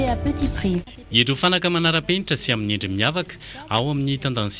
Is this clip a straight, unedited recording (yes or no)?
yes